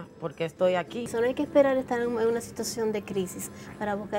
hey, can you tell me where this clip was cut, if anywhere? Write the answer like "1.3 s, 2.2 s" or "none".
1.1 s